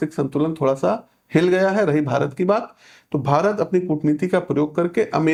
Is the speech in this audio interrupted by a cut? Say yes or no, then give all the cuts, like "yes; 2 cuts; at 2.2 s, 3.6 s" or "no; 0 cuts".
no; 0 cuts